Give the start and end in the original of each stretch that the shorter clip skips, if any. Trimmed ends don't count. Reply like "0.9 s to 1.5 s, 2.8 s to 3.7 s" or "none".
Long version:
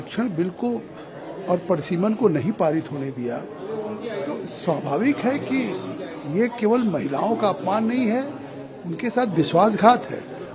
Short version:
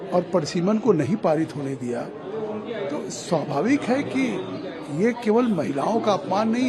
none